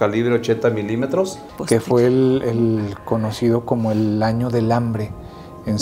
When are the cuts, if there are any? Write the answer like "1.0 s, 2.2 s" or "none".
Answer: 1.5 s